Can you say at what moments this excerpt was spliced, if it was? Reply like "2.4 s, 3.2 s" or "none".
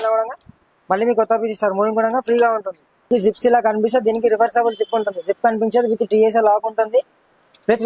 3.1 s